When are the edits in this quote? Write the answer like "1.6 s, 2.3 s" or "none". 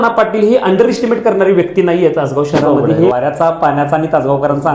3.1 s